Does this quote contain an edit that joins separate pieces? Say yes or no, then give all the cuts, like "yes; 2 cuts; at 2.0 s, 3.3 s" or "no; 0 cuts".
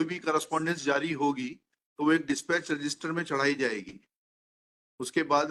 no; 0 cuts